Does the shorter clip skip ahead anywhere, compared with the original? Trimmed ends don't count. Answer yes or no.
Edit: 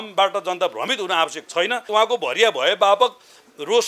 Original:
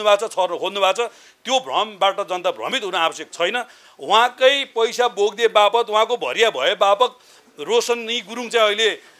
yes